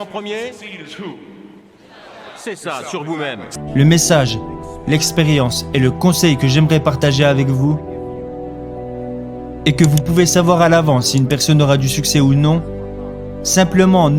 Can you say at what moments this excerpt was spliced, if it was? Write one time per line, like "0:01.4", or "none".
0:03.5